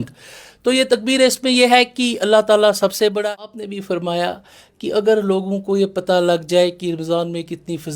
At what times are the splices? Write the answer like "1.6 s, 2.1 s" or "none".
3.3 s